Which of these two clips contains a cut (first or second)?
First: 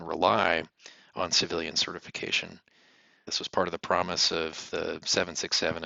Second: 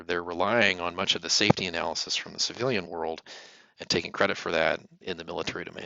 second